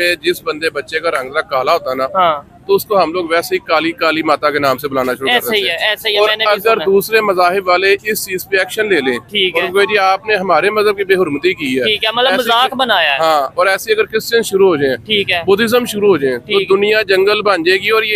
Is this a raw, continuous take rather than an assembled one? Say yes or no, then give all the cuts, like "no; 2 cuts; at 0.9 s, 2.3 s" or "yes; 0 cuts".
yes; 0 cuts